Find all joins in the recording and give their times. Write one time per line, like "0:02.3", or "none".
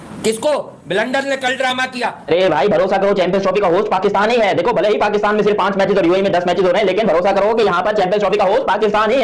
none